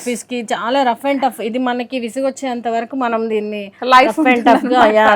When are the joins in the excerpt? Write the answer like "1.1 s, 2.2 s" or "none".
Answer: none